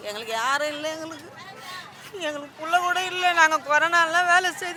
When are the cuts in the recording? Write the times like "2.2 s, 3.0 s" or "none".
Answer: none